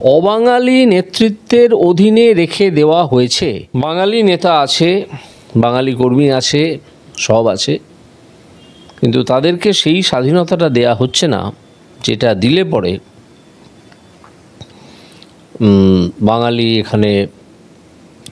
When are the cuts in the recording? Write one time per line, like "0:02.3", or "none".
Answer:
0:03.6